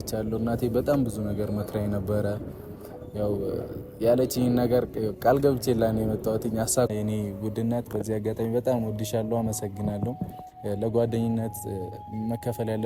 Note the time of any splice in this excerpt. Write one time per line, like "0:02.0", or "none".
0:06.9

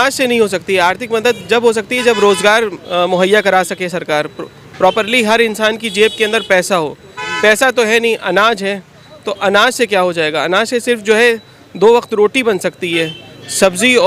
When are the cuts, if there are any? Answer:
none

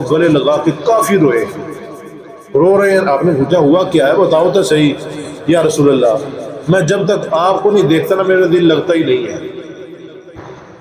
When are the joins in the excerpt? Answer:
none

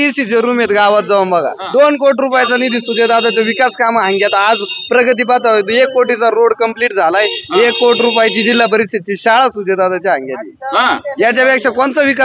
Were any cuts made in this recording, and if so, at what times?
0:01.6

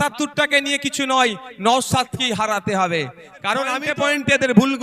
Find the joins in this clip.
0:03.8

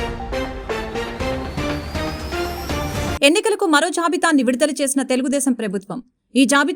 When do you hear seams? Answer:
0:02.6

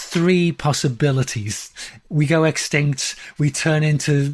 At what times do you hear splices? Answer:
0:01.6

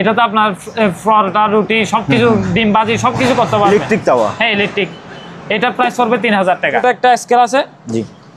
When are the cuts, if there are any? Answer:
0:06.8

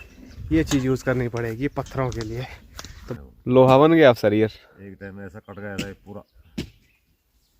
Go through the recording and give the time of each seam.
0:03.2

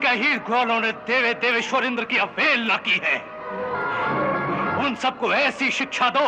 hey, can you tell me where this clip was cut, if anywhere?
none

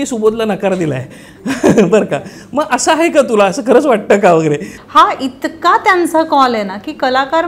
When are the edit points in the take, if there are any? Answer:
0:04.7

